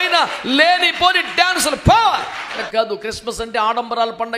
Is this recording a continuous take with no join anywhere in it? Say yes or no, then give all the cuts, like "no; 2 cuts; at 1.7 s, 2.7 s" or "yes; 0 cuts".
no; 1 cut; at 2.6 s